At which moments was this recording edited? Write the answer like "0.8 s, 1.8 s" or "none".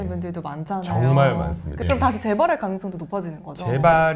1.7 s

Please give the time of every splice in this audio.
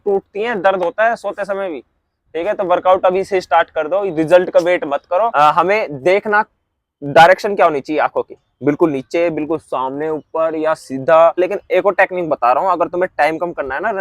5.3 s, 11.4 s

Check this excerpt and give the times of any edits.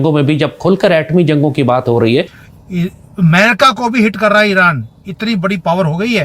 2.4 s

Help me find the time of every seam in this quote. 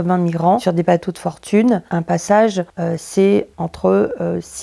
2.7 s, 3.5 s

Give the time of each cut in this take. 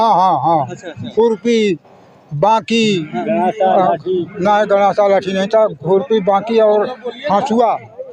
none

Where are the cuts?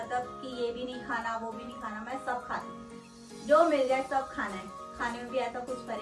none

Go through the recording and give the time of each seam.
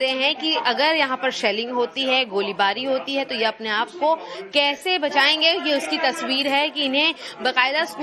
3.3 s

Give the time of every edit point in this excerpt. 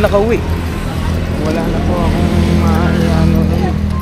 none

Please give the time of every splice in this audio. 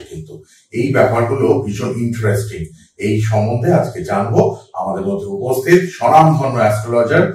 none

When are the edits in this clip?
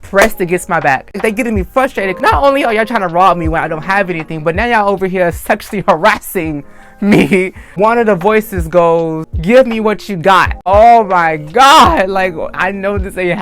1.2 s, 7.6 s, 10.6 s

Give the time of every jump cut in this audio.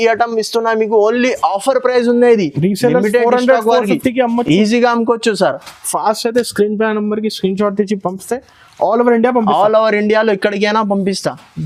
none

